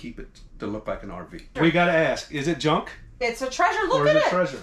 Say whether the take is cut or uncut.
cut